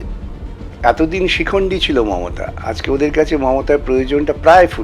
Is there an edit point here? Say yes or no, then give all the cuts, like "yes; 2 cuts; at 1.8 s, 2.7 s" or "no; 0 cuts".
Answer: no; 0 cuts